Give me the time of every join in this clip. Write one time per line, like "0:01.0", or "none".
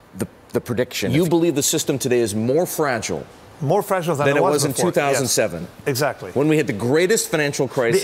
0:01.1